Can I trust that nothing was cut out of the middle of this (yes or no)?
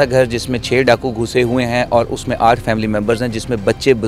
yes